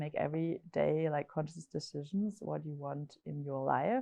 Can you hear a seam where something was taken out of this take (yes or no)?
no